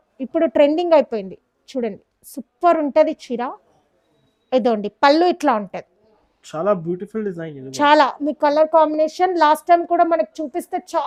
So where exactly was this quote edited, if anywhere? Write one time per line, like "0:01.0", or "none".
none